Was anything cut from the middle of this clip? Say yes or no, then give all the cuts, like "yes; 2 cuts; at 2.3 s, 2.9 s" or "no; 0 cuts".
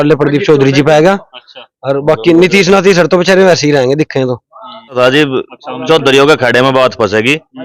yes; 1 cut; at 5.0 s